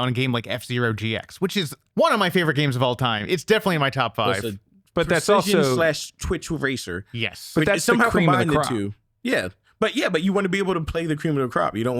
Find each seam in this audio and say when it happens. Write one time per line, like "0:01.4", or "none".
0:01.8